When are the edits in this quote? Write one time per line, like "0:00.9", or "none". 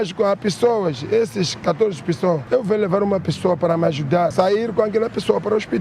0:02.4
0:04.3